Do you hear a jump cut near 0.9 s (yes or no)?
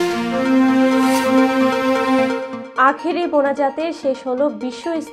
no